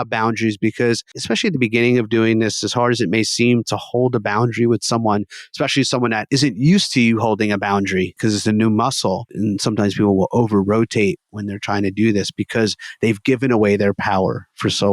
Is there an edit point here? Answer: yes; 4 cuts; at 1.2 s, 6.2 s, 8.1 s, 9.3 s

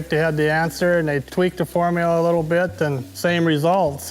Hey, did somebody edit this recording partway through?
yes; 2 cuts; at 1.3 s, 3.1 s

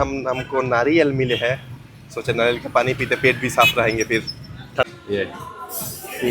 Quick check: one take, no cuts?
no; 1 cut; at 4.9 s

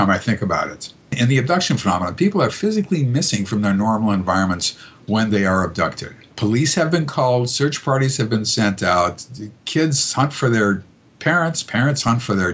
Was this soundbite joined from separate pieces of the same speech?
yes; 2 cuts; at 1.1 s, 6.3 s

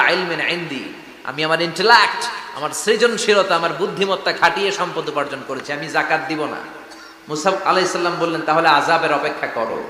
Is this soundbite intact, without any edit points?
yes; 0 cuts

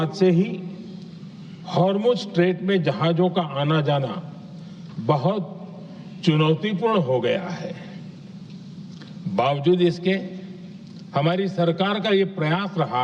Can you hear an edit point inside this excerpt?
no; 0 cuts

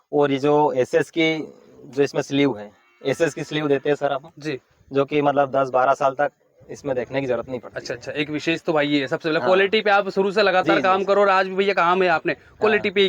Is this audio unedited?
yes; 0 cuts

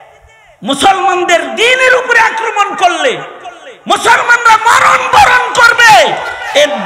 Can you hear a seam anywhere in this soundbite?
no; 0 cuts

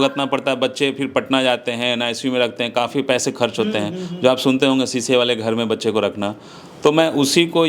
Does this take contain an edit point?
no; 0 cuts

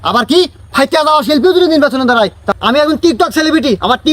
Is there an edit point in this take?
yes; 1 cut; at 2.4 s

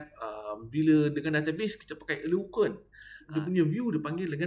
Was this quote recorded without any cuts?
no; 1 cut; at 3.3 s

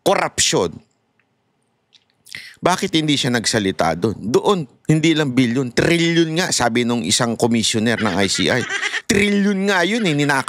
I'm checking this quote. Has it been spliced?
no; 0 cuts

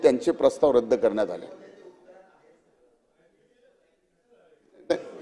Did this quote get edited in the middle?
no; 0 cuts

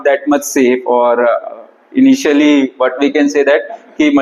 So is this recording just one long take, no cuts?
yes; 0 cuts

